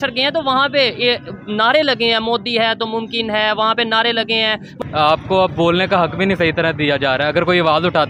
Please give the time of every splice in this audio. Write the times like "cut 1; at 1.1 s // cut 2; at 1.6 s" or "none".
cut 1; at 4.7 s